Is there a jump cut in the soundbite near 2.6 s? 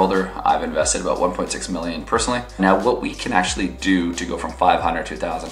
yes; 1 cut; at 2.6 s

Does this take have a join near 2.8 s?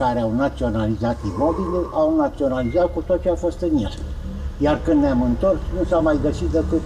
no; 0 cuts

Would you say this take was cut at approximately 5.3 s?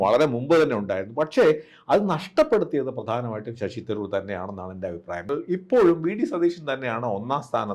yes; 1 cut; at 5.3 s

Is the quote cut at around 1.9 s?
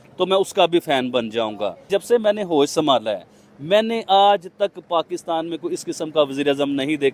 yes; 1 cut; at 1.9 s

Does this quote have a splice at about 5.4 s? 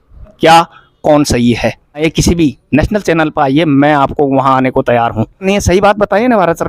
yes; 2 cuts; at 2.1 s, 5.4 s

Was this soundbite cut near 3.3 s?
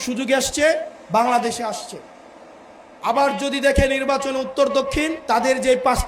no; 1 cut; at 5.2 s

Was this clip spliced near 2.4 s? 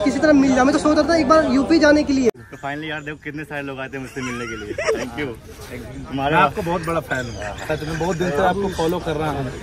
yes; 1 cut; at 2.4 s

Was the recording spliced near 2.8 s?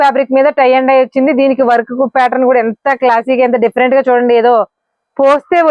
no; 0 cuts

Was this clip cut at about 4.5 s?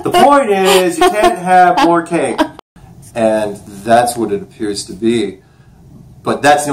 no; 1 cut; at 2.5 s

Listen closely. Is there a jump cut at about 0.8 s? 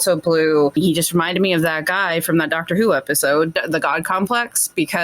yes; 2 cuts; at 0.8 s, 3.5 s

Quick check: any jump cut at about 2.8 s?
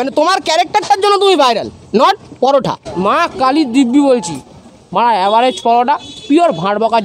yes; 1 cut; at 2.8 s

